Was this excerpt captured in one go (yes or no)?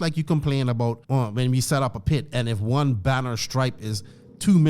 no